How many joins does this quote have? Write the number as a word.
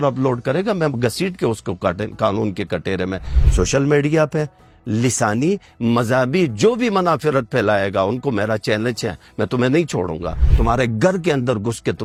zero